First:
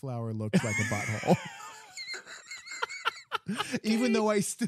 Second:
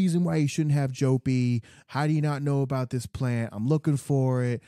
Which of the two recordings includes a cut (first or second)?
second